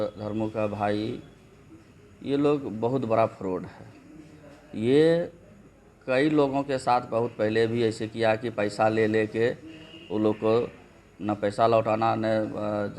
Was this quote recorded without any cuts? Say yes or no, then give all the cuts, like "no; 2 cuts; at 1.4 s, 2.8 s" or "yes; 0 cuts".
yes; 0 cuts